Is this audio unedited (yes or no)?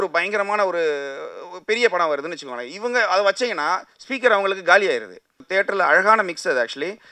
no